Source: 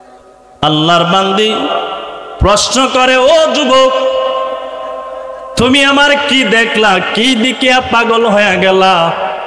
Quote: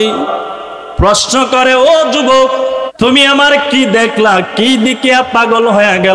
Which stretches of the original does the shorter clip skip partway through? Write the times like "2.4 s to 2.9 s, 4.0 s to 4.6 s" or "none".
4.3 s to 5.4 s